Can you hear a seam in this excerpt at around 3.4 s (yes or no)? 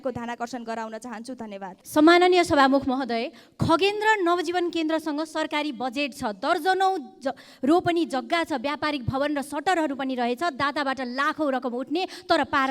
no